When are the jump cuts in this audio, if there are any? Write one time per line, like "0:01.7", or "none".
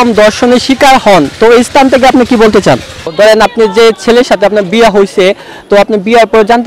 0:03.1